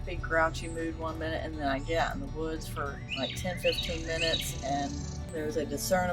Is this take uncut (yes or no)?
no